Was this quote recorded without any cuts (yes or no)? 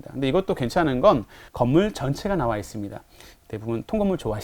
no